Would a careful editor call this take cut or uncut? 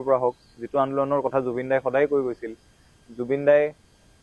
uncut